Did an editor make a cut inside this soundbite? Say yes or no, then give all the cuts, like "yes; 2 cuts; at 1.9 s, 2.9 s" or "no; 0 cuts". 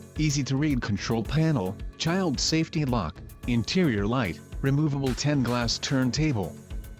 yes; 3 cuts; at 1.8 s, 3.0 s, 5.1 s